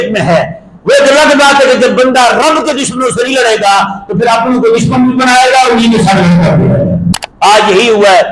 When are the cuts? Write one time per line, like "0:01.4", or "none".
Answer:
0:07.2